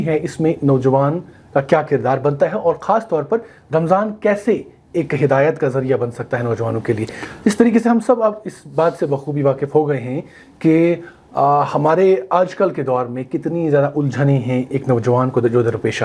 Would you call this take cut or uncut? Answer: uncut